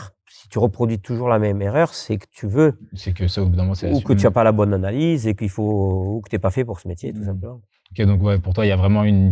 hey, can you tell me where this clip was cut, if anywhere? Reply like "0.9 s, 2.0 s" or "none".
none